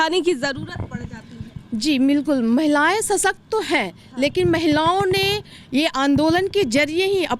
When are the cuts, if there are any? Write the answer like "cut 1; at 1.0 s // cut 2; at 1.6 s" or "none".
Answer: none